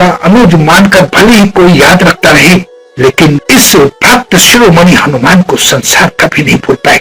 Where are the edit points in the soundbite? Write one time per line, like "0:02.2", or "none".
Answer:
none